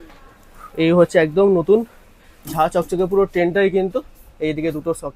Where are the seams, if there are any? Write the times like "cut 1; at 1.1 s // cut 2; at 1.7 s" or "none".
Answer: none